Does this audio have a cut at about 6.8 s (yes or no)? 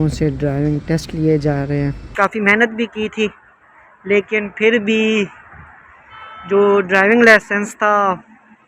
no